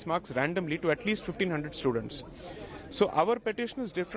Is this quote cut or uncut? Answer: uncut